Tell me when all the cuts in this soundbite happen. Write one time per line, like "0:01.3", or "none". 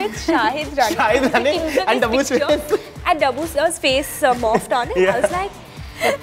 none